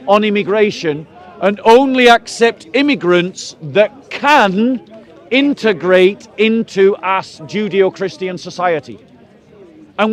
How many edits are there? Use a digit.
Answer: 0